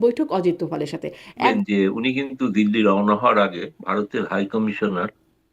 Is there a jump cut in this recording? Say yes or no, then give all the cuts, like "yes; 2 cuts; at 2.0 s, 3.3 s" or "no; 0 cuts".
yes; 1 cut; at 1.5 s